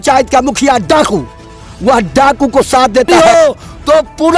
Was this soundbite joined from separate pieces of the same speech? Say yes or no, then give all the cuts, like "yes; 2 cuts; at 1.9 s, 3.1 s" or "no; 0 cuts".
yes; 1 cut; at 3.1 s